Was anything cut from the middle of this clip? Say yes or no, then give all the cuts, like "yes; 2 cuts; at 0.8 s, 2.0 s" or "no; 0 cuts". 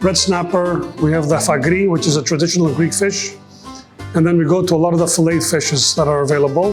no; 0 cuts